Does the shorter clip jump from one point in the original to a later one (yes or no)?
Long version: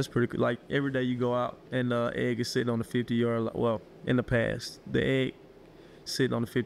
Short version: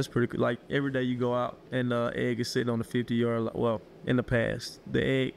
no